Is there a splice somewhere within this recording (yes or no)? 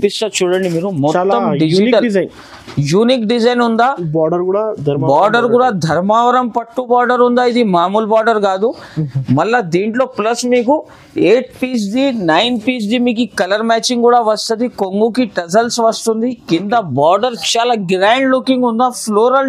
no